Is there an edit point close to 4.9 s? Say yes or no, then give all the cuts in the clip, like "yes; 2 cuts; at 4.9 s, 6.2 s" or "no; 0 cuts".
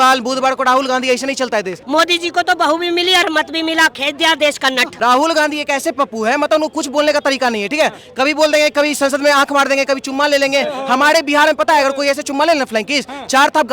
yes; 2 cuts; at 1.8 s, 4.9 s